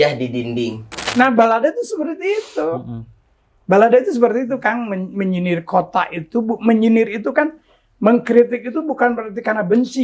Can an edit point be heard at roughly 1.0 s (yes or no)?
yes